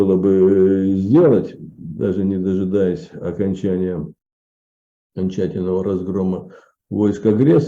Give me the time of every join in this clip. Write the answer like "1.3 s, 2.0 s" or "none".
none